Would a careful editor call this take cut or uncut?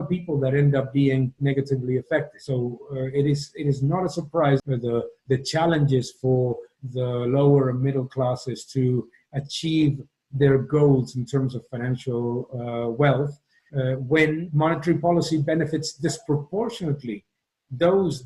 cut